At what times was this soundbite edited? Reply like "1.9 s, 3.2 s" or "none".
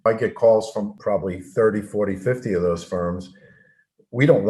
0.9 s